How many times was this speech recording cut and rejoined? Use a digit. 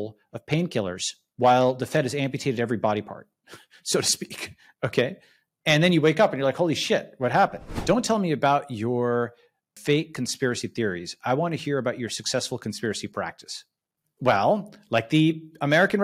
3